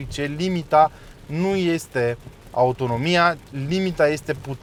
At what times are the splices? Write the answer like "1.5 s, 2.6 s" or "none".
none